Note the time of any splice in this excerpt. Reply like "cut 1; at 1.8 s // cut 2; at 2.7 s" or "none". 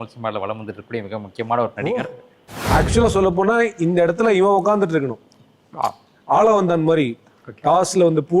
cut 1; at 2.6 s